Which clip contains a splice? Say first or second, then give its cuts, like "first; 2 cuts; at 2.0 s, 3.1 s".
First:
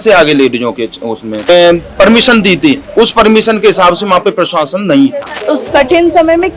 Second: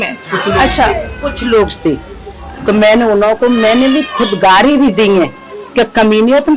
first; 2 cuts; at 1.5 s, 5.4 s